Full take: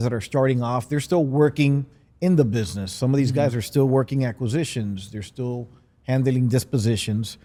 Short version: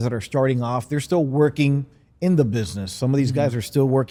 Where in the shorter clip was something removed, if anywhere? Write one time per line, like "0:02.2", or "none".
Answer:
none